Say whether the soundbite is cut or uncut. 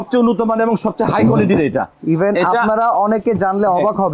uncut